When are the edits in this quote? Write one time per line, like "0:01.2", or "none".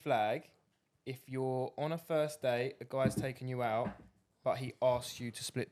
none